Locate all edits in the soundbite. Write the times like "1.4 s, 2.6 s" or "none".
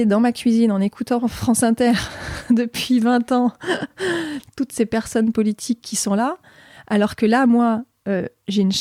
none